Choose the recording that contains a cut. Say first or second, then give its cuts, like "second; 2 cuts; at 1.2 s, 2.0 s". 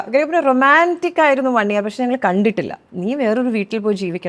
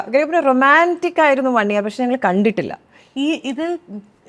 first; 1 cut; at 2.8 s